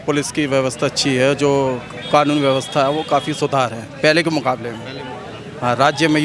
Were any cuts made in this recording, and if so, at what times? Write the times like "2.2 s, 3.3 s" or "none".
none

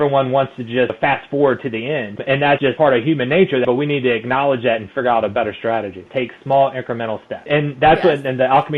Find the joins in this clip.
0.9 s, 2.6 s, 3.6 s, 6.1 s, 7.5 s

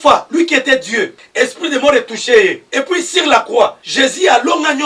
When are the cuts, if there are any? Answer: 1.2 s, 2.6 s, 3.8 s

